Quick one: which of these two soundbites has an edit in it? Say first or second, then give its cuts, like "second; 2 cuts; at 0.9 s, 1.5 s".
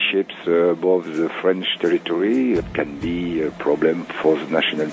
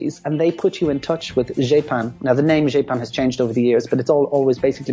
first; 2 cuts; at 2.6 s, 4.1 s